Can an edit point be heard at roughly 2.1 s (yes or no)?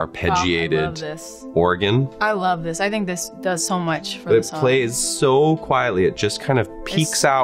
yes